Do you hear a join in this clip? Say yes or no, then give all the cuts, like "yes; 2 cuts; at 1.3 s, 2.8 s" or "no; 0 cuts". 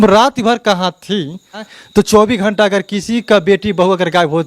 yes; 1 cut; at 1.7 s